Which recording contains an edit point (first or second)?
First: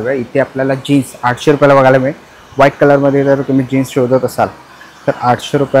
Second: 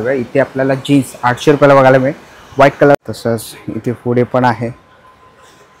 second